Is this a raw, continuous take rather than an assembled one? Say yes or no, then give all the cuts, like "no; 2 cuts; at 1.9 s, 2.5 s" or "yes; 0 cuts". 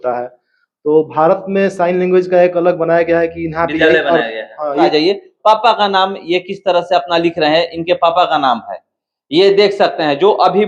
no; 1 cut; at 4.9 s